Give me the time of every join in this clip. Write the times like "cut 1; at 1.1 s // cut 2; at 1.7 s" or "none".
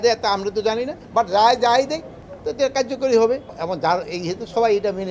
cut 1; at 1.0 s // cut 2; at 3.5 s